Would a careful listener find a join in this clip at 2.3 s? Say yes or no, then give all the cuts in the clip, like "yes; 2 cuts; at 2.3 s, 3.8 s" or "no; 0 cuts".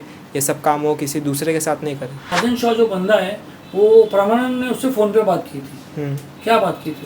yes; 1 cut; at 2.3 s